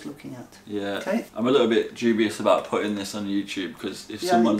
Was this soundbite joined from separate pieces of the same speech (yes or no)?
yes